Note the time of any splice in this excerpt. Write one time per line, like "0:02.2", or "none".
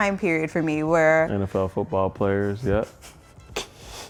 none